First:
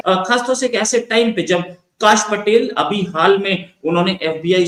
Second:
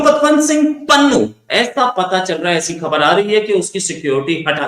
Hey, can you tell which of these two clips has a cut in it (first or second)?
second